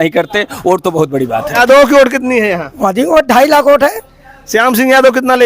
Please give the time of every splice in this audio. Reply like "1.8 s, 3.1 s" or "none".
1.6 s